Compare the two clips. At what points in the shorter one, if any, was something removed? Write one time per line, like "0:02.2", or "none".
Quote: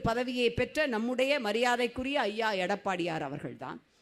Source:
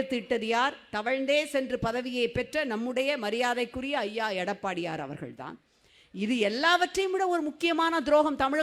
none